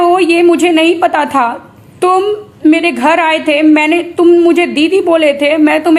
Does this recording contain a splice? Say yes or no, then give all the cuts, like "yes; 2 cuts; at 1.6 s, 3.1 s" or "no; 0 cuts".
no; 0 cuts